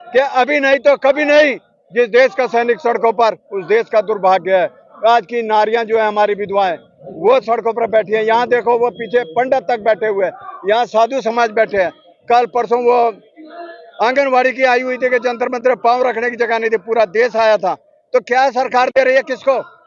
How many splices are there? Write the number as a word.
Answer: zero